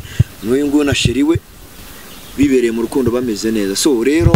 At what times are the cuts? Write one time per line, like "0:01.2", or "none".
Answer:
none